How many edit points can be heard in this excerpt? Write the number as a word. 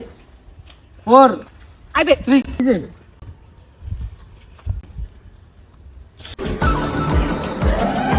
one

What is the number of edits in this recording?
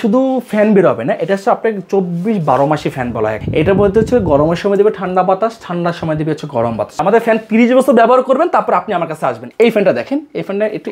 three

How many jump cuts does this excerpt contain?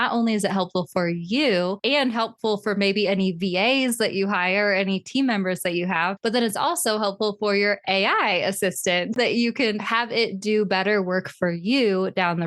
one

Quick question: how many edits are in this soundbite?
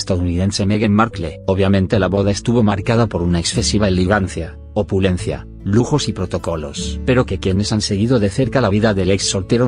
one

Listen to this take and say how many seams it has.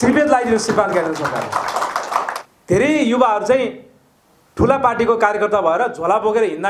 one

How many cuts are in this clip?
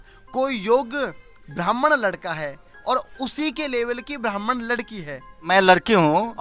one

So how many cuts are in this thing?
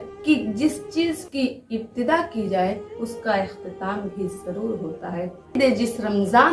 one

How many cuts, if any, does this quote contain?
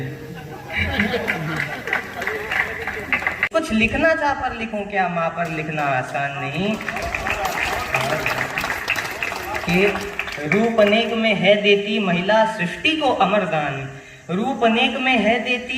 one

